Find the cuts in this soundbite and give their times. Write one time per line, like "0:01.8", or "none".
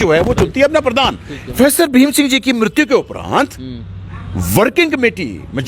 0:01.6